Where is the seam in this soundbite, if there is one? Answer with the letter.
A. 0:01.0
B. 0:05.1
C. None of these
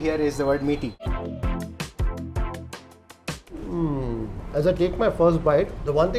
A